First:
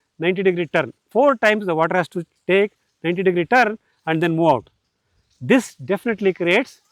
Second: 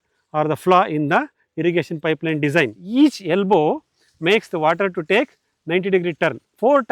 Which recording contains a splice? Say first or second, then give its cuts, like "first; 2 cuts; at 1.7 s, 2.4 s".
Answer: second; 1 cut; at 2.8 s